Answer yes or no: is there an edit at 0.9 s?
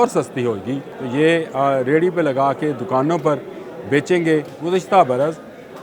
yes